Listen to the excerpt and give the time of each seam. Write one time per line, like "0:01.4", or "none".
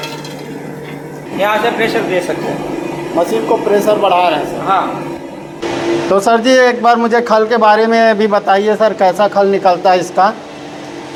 none